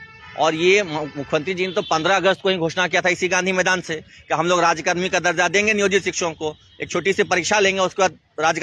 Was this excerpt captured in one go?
yes; 0 cuts

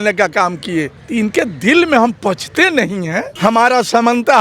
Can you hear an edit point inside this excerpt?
yes; 2 cuts; at 1.0 s, 3.3 s

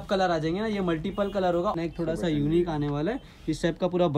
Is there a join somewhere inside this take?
yes; 1 cut; at 1.8 s

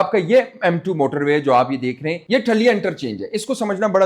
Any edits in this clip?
yes; 1 cut; at 2.2 s

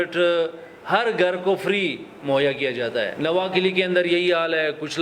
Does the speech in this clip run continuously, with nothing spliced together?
no; 1 cut; at 3.1 s

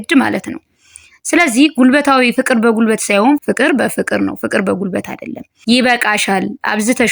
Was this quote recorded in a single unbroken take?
no; 1 cut; at 3.4 s

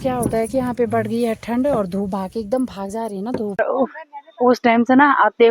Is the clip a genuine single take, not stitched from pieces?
no; 1 cut; at 3.6 s

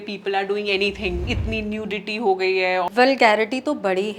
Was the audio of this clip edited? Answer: yes; 2 cuts; at 1.2 s, 2.8 s

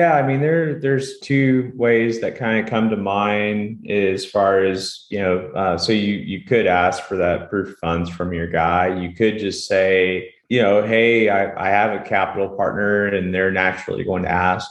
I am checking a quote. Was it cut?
yes; 2 cuts; at 1.2 s, 10.3 s

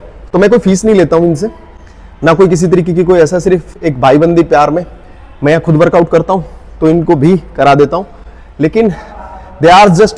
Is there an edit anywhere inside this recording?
no; 0 cuts

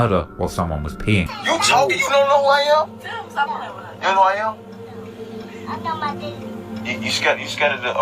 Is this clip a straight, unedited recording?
no; 1 cut; at 1.3 s

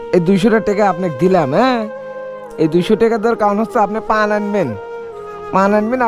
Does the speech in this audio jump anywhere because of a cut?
no; 0 cuts

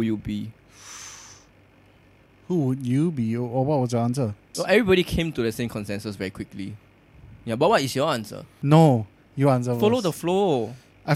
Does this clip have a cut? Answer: yes; 2 cuts; at 4.5 s, 8.6 s

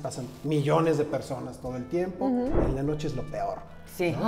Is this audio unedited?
no; 1 cut; at 2.6 s

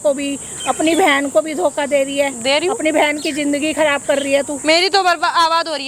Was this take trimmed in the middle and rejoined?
no; 0 cuts

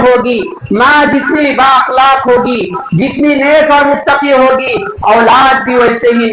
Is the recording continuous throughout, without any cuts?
yes; 0 cuts

